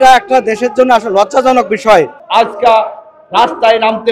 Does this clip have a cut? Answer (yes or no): yes